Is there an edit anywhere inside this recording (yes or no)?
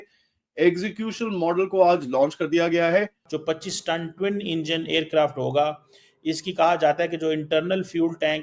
yes